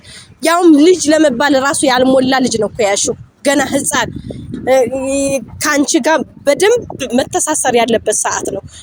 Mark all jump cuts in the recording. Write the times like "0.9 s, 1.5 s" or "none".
none

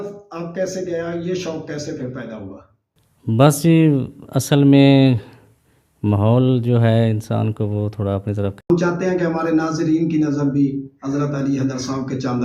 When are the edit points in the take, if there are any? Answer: 8.7 s

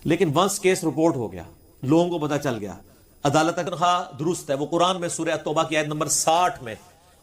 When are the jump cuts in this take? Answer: 3.6 s

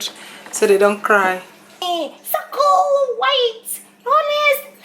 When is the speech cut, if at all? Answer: 1.8 s

